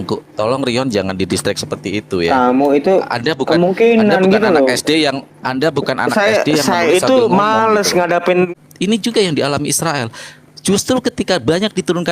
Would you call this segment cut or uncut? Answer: cut